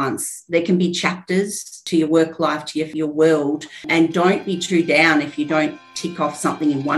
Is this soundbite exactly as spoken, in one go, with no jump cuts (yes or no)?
no